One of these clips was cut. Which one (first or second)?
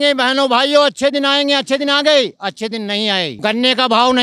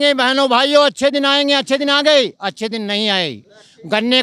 first